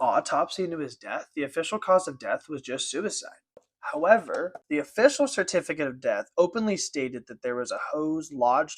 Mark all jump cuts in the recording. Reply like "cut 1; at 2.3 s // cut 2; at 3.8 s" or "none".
cut 1; at 3.7 s // cut 2; at 4.6 s